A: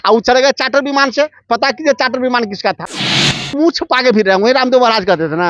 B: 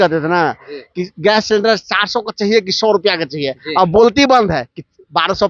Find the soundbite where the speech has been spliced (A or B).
A